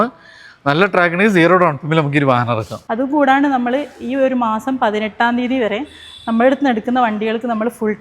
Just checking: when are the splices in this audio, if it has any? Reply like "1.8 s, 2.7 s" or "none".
2.8 s